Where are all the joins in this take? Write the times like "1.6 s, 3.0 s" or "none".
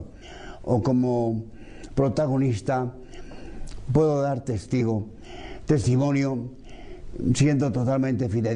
2.3 s